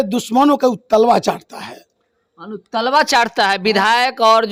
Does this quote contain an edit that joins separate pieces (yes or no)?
no